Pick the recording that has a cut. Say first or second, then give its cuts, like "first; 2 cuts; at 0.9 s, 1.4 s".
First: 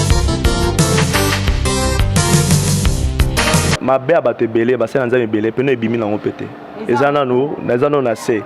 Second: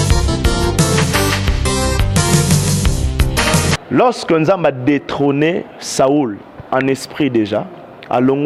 first; 1 cut; at 3.7 s